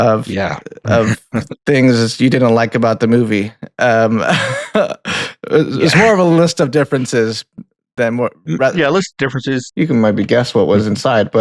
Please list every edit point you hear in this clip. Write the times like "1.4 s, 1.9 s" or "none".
9.7 s